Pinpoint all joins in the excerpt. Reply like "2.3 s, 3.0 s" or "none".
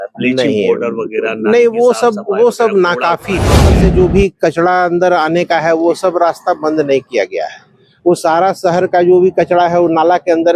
3.7 s